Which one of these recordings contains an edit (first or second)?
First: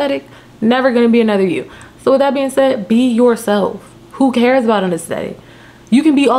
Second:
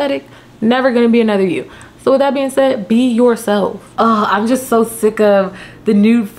second